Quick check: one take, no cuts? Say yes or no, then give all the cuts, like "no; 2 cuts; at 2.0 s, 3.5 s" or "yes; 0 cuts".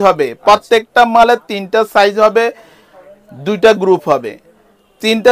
yes; 0 cuts